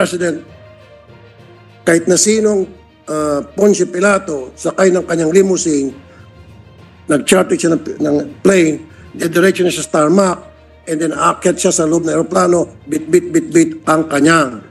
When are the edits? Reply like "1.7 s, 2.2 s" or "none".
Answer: none